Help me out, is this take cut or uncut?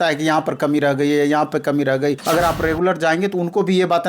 cut